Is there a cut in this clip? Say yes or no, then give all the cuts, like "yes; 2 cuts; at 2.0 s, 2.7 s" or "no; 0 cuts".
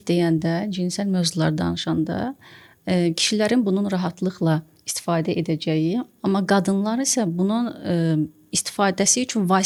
no; 0 cuts